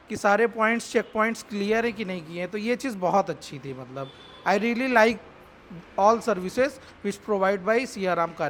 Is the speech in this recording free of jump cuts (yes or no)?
yes